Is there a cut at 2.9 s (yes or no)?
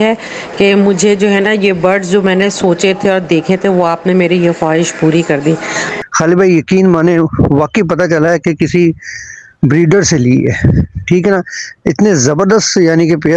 no